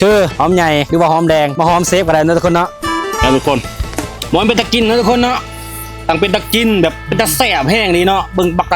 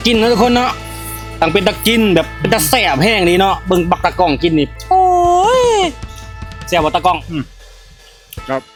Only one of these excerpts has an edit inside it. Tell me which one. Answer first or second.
first